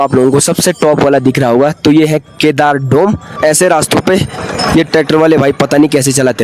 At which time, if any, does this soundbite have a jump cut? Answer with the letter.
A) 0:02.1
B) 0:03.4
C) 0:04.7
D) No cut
B